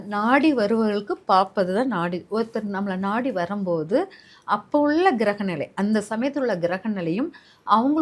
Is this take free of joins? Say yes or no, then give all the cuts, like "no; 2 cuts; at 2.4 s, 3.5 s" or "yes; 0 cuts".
yes; 0 cuts